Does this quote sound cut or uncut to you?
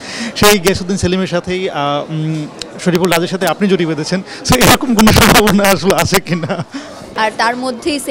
cut